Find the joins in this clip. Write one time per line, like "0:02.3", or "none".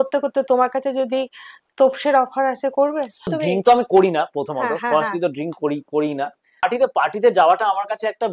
0:03.3
0:06.7